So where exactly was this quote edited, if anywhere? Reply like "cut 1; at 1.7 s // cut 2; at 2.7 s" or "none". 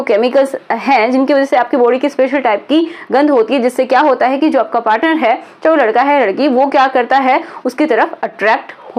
none